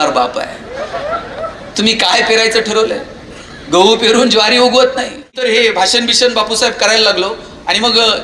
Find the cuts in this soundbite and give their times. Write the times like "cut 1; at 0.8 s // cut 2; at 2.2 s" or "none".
cut 1; at 5.3 s